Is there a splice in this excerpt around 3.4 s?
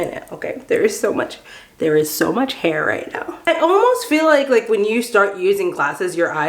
yes; 1 cut; at 3.4 s

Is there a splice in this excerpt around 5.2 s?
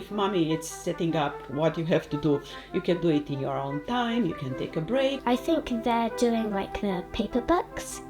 yes; 1 cut; at 5.2 s

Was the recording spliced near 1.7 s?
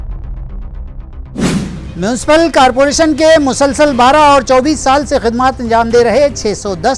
yes; 1 cut; at 1.7 s

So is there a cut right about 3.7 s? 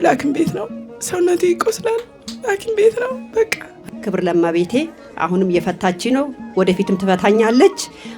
yes; 1 cut; at 3.7 s

